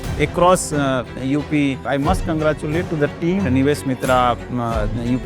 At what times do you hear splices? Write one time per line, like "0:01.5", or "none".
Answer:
0:01.8
0:03.4